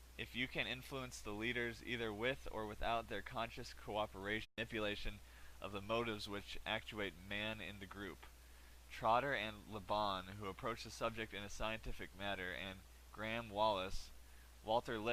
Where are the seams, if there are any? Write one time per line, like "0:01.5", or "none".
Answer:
none